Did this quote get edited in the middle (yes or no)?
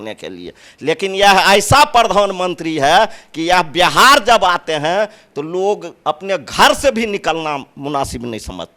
no